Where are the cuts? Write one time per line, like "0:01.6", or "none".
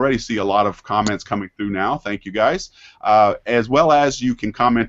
0:01.2